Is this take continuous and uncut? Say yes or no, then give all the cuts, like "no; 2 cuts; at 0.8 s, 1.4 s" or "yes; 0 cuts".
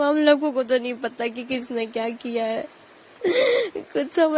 yes; 0 cuts